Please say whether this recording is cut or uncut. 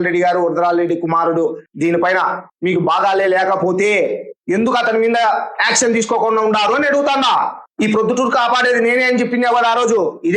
cut